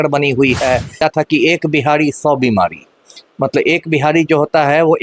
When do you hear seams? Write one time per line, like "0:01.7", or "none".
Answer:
0:01.0